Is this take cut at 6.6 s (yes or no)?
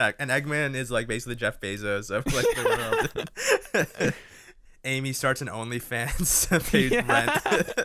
no